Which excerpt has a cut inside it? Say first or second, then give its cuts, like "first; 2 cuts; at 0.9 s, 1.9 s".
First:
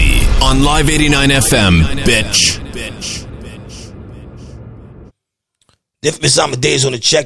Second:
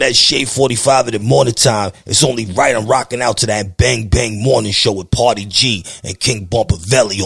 first; 1 cut; at 5.1 s